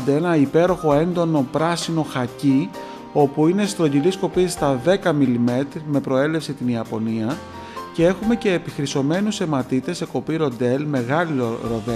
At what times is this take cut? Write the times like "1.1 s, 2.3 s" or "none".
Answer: none